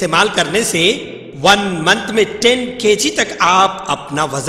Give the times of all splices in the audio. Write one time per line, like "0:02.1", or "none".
none